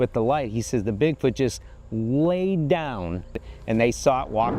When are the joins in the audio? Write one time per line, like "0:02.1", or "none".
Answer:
0:03.4

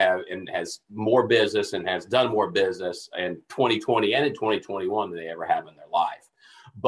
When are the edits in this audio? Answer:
none

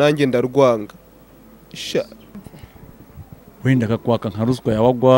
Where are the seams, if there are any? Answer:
0:02.5

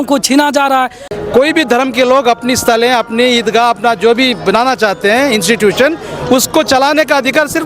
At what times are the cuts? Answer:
0:01.1

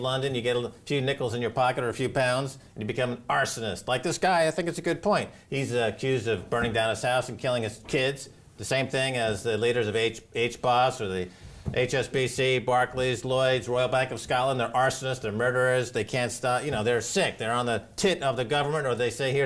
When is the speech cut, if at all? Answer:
0:08.7

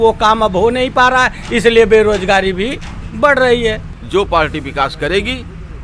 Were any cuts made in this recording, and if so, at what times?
0:03.9

